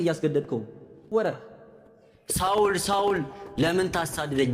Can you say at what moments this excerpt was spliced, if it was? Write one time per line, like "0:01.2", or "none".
0:01.1

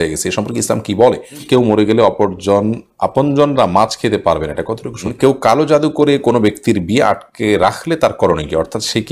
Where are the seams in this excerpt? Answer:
0:01.4
0:05.1

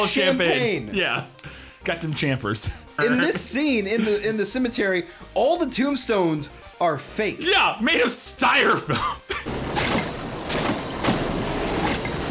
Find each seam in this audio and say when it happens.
0:02.8

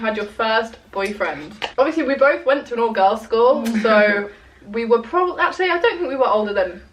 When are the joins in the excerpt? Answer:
none

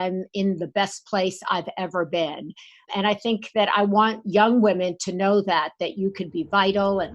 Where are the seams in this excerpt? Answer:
0:02.9

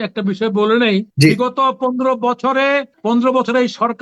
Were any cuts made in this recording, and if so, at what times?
0:01.1
0:02.9

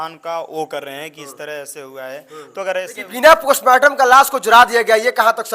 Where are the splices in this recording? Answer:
0:03.0

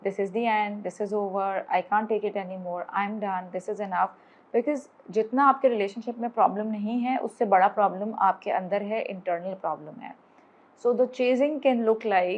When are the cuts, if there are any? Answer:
none

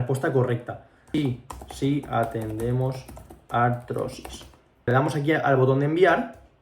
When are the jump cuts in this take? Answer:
0:01.1
0:04.9

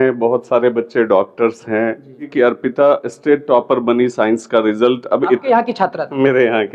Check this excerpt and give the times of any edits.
0:02.3

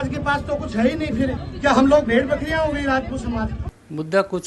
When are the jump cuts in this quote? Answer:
0:01.5

